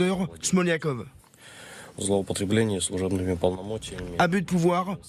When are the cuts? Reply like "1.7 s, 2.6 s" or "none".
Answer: none